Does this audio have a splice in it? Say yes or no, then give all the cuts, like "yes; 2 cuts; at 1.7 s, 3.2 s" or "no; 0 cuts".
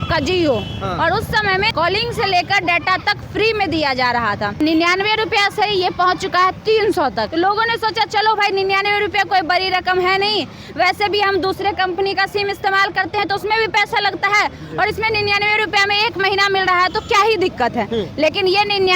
yes; 3 cuts; at 1.7 s, 4.6 s, 7.3 s